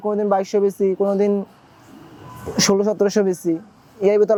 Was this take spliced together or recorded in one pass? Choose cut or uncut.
uncut